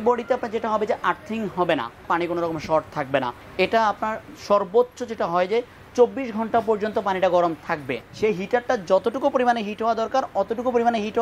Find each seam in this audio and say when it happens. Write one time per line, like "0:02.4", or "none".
0:02.1
0:03.4
0:08.0

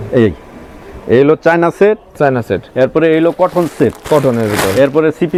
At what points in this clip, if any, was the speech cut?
none

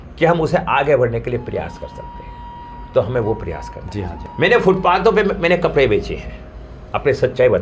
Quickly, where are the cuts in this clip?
0:04.2

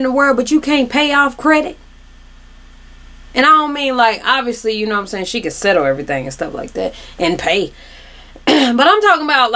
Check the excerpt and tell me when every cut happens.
none

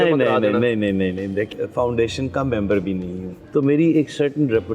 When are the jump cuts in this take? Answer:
0:01.5
0:03.4

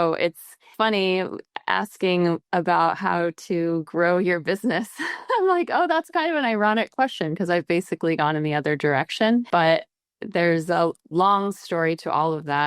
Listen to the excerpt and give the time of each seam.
0:09.5
0:11.0

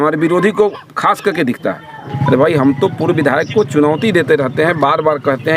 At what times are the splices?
0:02.1

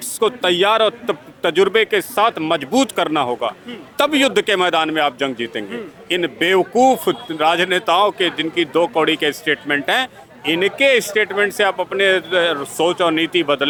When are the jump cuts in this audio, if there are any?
none

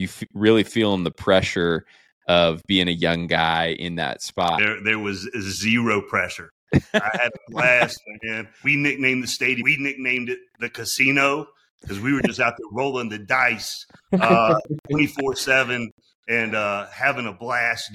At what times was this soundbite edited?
0:04.6
0:08.5
0:09.6

